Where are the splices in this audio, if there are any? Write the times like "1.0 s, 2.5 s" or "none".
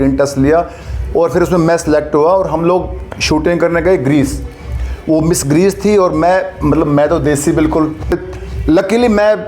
8.1 s